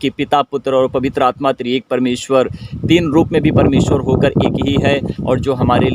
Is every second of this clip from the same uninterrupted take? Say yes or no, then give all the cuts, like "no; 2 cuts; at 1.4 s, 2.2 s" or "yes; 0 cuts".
yes; 0 cuts